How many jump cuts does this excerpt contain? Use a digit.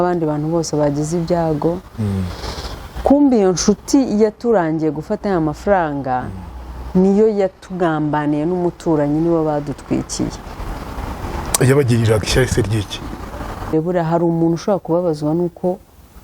1